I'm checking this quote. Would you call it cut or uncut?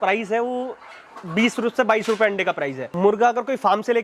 cut